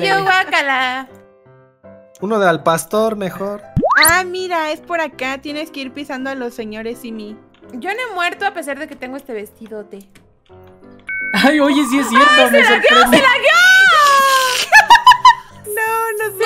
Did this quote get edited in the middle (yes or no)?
yes